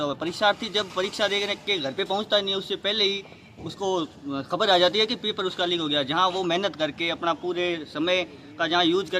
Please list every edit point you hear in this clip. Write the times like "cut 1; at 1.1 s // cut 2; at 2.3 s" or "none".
none